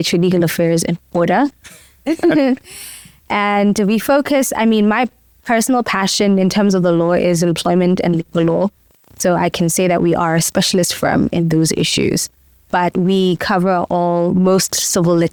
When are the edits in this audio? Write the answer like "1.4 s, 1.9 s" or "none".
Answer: none